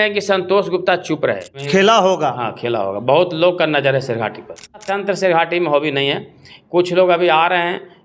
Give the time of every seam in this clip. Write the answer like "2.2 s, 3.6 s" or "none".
1.6 s, 4.9 s